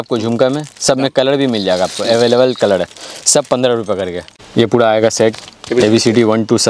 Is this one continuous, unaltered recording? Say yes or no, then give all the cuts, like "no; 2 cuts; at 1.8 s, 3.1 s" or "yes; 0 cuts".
no; 1 cut; at 4.3 s